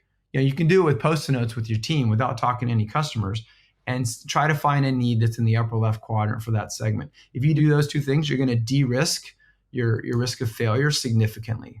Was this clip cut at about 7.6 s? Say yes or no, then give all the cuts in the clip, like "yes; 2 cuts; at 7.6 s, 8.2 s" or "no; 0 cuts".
yes; 1 cut; at 7.6 s